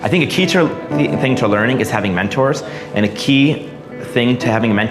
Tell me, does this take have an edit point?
no; 0 cuts

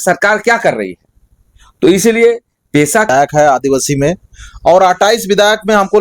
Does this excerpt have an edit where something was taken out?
yes; 1 cut; at 3.1 s

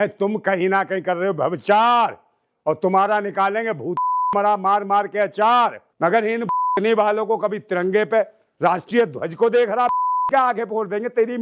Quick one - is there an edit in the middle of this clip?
yes; 1 cut; at 5.8 s

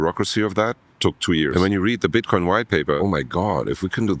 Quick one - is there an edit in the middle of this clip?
yes; 2 cuts; at 1.5 s, 3.0 s

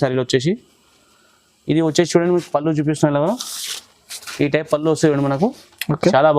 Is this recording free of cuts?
yes; 0 cuts

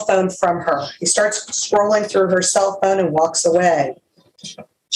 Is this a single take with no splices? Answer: yes; 0 cuts

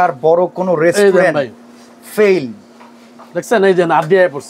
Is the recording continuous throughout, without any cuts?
yes; 0 cuts

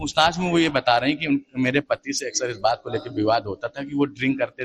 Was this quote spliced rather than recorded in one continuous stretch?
no; 0 cuts

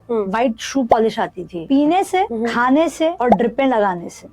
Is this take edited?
yes; 3 cuts; at 1.5 s, 2.3 s, 3.2 s

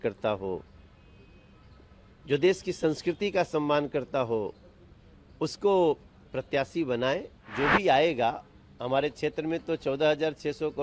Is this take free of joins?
no; 1 cut; at 7.4 s

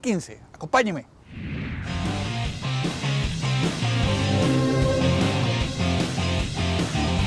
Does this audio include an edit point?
no; 0 cuts

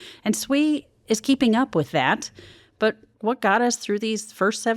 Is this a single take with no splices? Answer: no; 1 cut; at 3.1 s

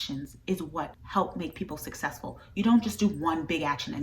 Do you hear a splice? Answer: yes; 1 cut; at 1.0 s

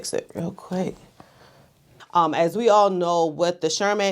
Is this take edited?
yes; 1 cut; at 1.7 s

